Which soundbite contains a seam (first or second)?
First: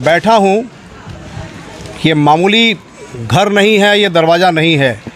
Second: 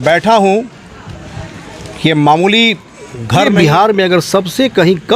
second